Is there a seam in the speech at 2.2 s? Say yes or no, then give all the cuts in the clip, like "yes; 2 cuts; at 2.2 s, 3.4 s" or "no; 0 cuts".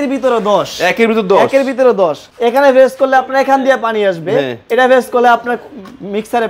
yes; 1 cut; at 2.2 s